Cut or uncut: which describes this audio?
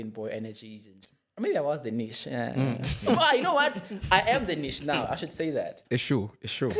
cut